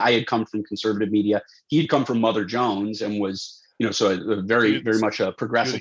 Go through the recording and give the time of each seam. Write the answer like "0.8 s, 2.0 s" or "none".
none

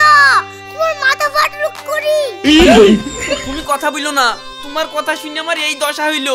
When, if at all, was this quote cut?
none

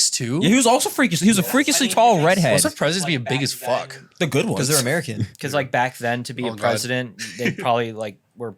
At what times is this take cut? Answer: 2.6 s

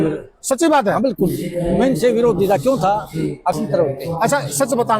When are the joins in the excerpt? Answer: 3.5 s

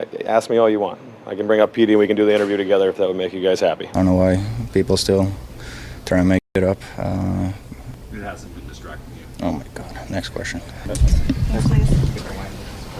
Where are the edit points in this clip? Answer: 3.8 s, 7.9 s, 10.9 s

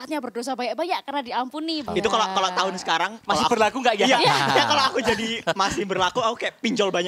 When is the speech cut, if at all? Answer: 1.9 s

